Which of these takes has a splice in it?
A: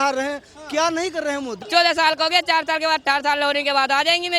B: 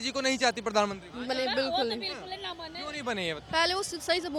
A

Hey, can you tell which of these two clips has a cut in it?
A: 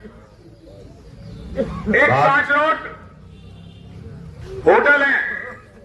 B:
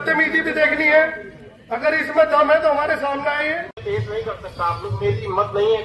B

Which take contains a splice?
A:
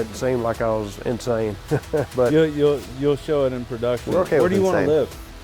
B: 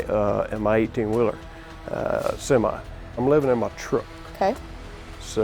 B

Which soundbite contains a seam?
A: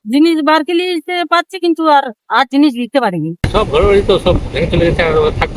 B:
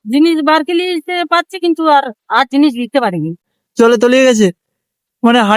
A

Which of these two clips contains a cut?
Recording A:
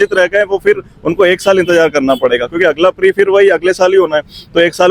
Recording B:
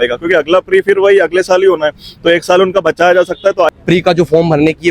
B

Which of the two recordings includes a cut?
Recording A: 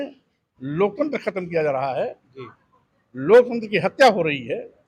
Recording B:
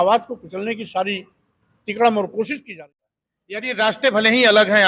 B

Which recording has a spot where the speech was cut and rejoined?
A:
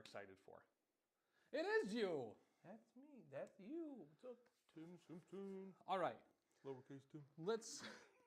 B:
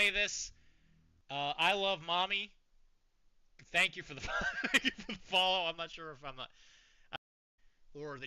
B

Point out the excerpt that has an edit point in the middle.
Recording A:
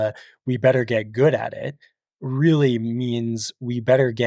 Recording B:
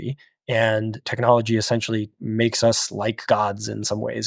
B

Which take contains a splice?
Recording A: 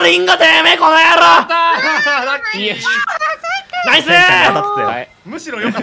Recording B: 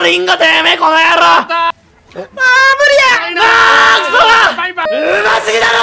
B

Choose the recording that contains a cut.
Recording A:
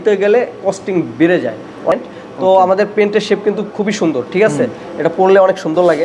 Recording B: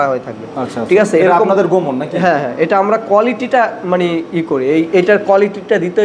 A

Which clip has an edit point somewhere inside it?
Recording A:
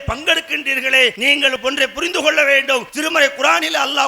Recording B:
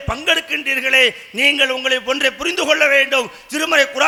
A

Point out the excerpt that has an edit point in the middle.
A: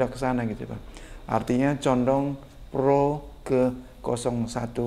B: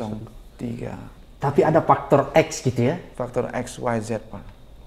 B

